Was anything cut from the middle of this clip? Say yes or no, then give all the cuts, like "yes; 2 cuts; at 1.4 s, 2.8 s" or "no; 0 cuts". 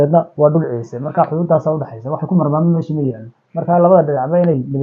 no; 0 cuts